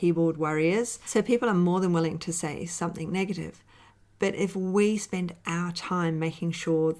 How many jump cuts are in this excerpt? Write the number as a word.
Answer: one